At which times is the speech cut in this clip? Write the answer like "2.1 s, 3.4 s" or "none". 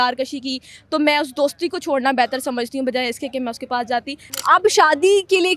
4.2 s